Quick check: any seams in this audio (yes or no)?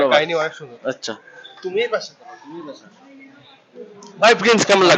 no